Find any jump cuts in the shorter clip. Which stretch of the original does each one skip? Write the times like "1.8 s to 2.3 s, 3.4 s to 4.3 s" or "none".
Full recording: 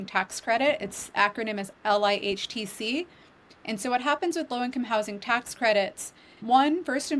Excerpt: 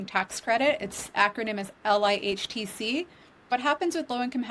3.5 s to 3.9 s